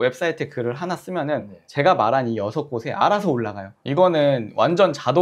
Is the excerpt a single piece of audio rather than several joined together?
no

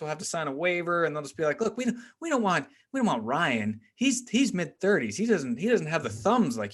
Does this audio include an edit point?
no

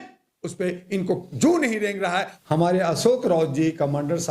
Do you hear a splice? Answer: yes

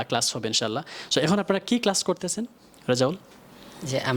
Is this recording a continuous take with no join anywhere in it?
yes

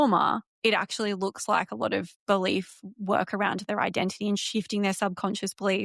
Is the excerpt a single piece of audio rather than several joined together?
yes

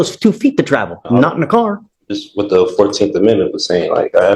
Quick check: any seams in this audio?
no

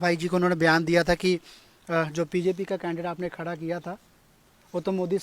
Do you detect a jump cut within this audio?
no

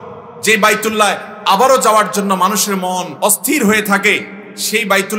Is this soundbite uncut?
no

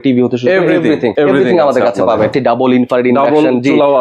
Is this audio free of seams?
no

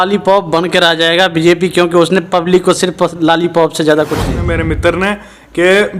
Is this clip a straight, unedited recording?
no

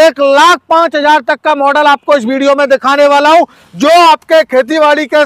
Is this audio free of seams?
yes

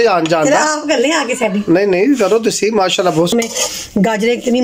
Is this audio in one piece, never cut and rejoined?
no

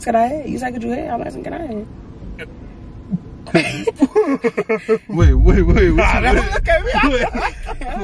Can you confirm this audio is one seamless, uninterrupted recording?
yes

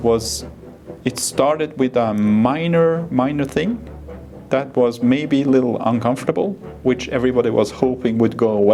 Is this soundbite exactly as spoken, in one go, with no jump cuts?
yes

